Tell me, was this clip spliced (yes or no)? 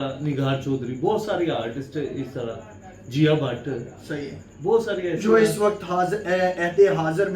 no